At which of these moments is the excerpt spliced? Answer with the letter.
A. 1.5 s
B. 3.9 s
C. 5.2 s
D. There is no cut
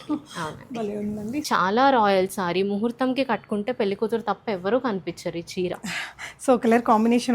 A